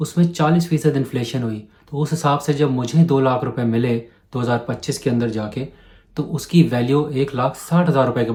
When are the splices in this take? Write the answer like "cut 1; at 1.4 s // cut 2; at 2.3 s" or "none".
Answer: none